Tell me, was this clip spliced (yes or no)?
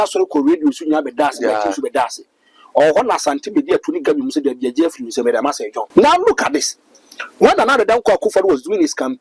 yes